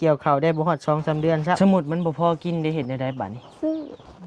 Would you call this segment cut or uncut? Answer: cut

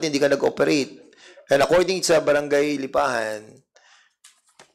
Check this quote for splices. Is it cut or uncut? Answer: uncut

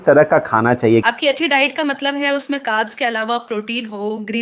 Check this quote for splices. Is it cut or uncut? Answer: cut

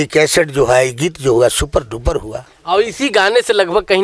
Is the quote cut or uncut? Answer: uncut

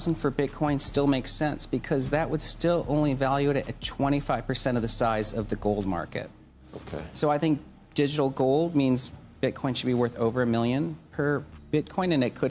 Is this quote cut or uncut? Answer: uncut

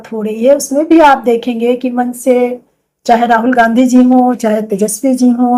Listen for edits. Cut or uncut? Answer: uncut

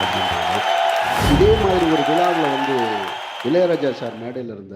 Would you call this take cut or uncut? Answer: cut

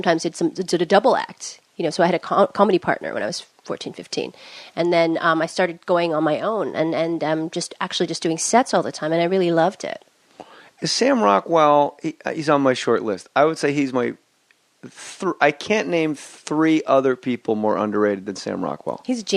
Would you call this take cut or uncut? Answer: cut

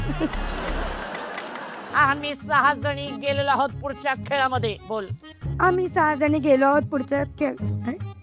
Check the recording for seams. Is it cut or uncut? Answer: cut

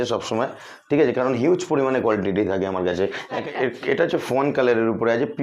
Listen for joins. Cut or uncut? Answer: cut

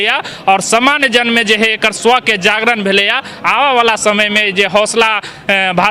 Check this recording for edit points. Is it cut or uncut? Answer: uncut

